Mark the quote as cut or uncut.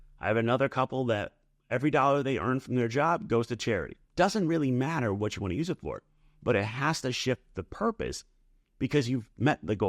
cut